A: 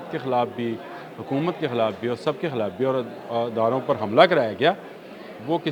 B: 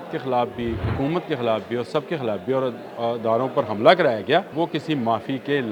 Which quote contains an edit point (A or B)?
B